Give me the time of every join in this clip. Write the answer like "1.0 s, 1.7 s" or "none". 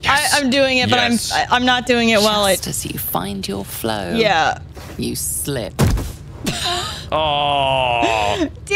none